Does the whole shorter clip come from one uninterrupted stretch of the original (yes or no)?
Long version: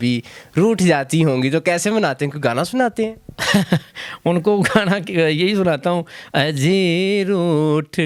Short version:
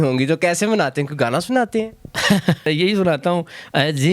no